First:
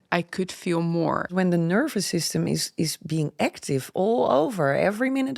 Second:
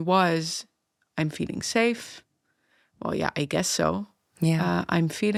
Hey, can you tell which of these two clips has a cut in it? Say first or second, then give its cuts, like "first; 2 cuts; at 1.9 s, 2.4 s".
first; 1 cut; at 1.3 s